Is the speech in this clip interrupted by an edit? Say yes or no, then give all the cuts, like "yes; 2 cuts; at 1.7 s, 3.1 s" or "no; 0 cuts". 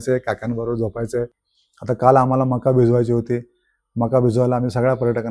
yes; 1 cut; at 1.4 s